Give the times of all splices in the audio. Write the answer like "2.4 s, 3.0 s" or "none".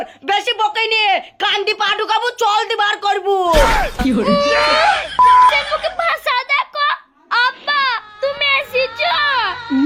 none